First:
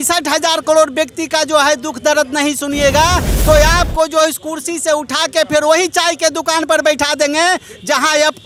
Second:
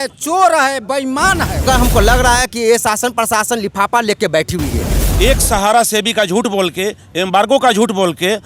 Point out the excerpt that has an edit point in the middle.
second; 2 cuts; at 1.6 s, 5.0 s

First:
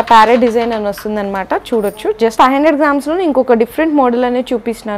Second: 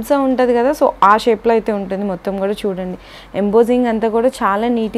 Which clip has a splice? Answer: first; 1 cut; at 2.3 s

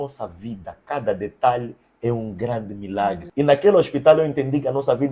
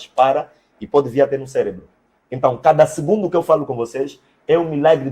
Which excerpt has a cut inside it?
first; 1 cut; at 3.2 s

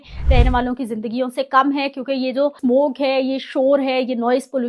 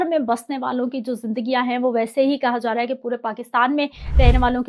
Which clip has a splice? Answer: first; 1 cut; at 2.6 s

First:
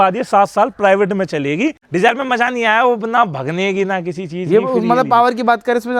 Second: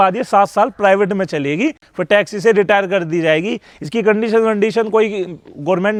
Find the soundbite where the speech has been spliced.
first; 1 cut; at 1.8 s

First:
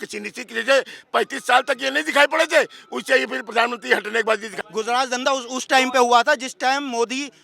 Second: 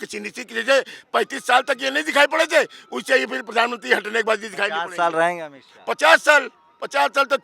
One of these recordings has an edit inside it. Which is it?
first; 1 cut; at 4.5 s

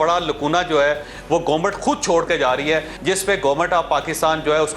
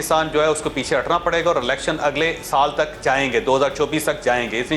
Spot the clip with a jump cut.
first; 1 cut; at 2.9 s

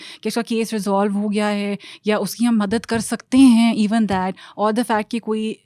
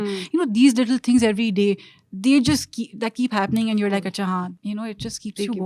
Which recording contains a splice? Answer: second; 1 cut; at 4.5 s

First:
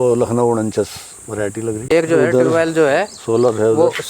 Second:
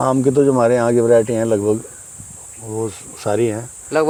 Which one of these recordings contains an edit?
first; 1 cut; at 2.0 s

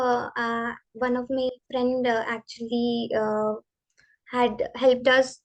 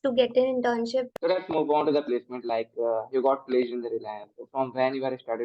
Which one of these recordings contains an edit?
second; 1 cut; at 1.1 s

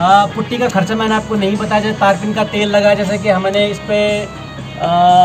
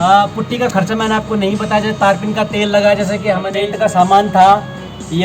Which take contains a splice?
second; 1 cut; at 3.6 s

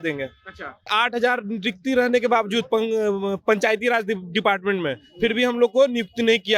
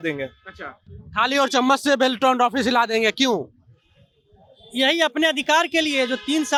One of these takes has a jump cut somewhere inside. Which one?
first; 1 cut; at 0.9 s

